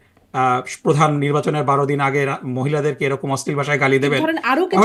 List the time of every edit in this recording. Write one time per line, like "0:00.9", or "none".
none